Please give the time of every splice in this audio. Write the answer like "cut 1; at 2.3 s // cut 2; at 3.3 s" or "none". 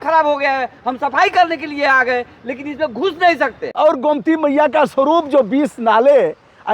cut 1; at 3.6 s